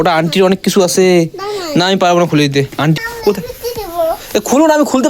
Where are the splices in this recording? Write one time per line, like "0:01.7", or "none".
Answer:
0:03.0

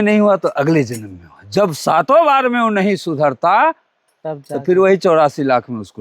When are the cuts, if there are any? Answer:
none

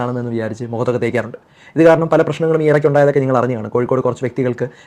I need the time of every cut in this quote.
none

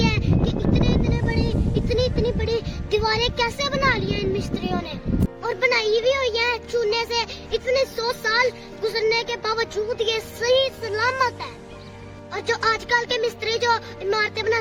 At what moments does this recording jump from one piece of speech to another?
none

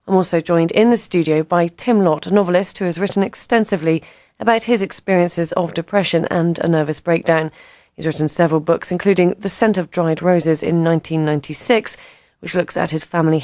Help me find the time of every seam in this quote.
0:04.8

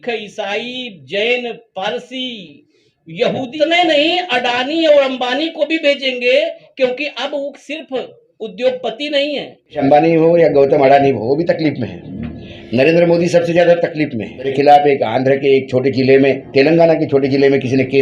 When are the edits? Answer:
0:03.5
0:09.8
0:14.5

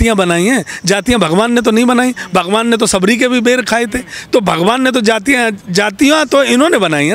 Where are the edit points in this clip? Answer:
none

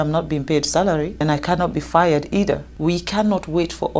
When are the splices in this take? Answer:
0:01.2
0:02.7

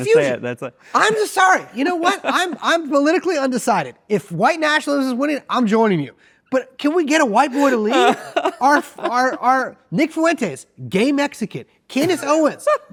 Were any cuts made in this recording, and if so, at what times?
none

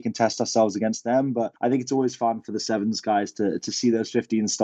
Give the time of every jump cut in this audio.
0:01.5

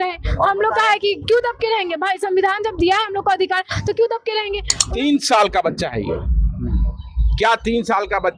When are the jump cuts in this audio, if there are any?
0:04.7

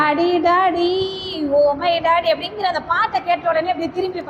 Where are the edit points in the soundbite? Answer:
none

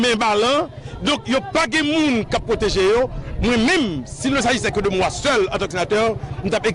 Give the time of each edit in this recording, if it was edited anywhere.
0:05.7

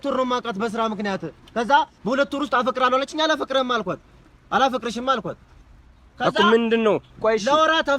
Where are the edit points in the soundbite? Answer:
none

